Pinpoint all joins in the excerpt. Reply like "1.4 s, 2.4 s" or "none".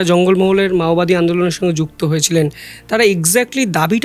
none

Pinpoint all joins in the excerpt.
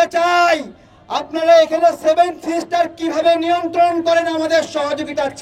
none

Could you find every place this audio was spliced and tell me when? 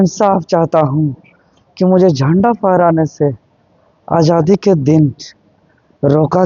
none

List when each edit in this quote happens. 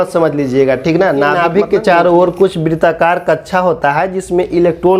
1.4 s

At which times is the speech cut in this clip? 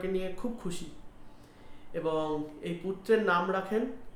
none

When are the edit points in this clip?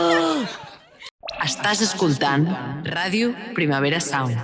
1.0 s

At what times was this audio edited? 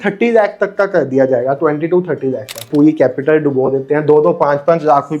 2.7 s

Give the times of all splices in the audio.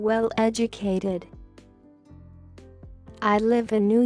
1.3 s, 2.8 s

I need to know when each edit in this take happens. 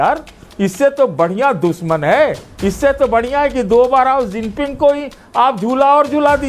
none

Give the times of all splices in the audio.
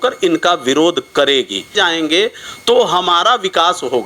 1.7 s

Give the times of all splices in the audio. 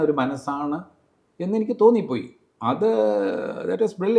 none

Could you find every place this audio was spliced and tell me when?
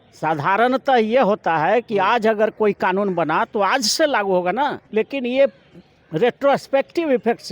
4.8 s

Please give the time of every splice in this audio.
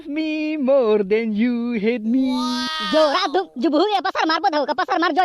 2.7 s

